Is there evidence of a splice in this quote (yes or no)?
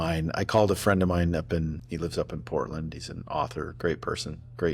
yes